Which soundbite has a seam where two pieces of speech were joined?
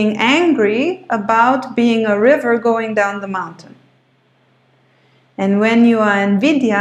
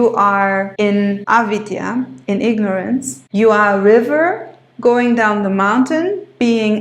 second; 2 cuts; at 1.0 s, 3.2 s

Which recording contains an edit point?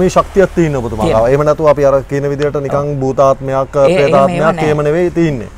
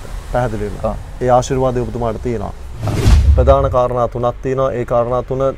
second; 1 cut; at 3.2 s

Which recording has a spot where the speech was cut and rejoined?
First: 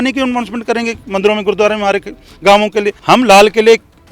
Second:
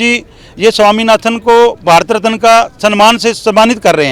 first; 1 cut; at 3.0 s

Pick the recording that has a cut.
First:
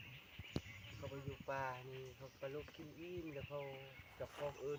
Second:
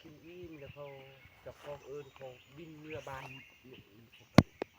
second; 1 cut; at 3.2 s

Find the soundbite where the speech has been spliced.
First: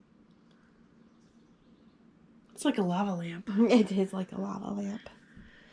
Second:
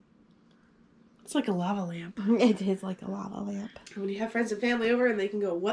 second; 2 cuts; at 1.2 s, 3.8 s

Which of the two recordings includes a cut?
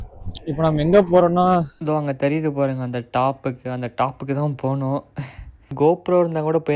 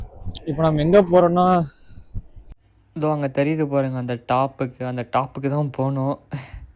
first; 2 cuts; at 1.7 s, 5.7 s

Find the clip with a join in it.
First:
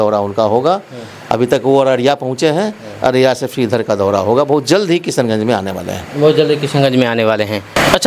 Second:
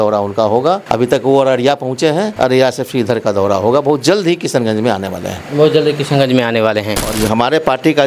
second; 3 cuts; at 0.8 s, 2.3 s, 7.1 s

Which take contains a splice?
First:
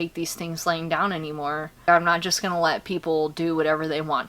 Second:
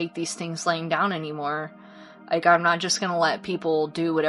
first; 1 cut; at 1.8 s

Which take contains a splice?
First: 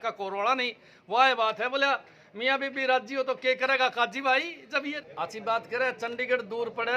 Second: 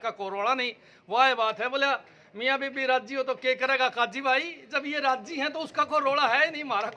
first; 1 cut; at 5.0 s

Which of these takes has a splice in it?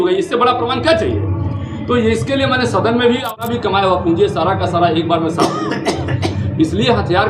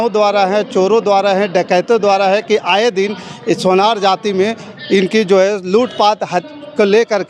first; 1 cut; at 3.3 s

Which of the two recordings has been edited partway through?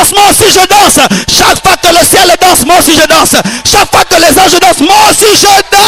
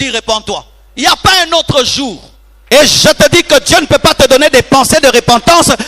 second; 1 cut; at 2.6 s

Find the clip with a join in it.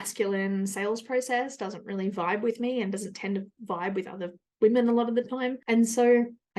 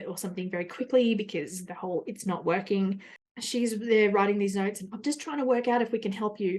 second; 1 cut; at 3.1 s

